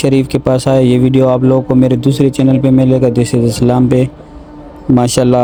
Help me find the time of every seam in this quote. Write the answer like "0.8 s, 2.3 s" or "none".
none